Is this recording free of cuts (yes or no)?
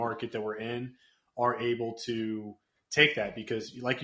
yes